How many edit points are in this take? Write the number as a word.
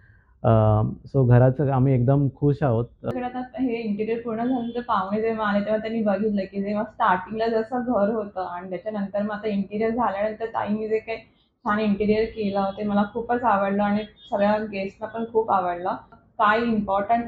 two